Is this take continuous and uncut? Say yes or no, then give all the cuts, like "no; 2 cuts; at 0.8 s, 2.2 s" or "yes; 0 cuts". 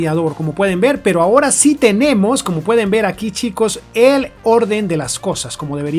yes; 0 cuts